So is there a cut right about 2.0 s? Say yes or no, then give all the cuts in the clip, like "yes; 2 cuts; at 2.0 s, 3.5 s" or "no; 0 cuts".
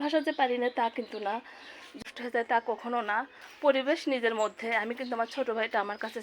yes; 1 cut; at 2.0 s